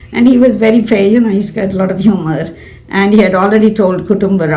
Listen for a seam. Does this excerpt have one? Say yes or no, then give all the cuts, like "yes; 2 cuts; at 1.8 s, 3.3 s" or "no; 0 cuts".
no; 0 cuts